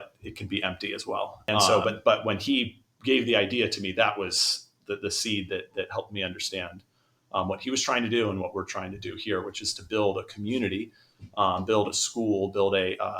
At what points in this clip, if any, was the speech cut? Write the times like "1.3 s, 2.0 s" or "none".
1.7 s